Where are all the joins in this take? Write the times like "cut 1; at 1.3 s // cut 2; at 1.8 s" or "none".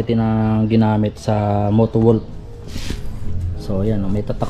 none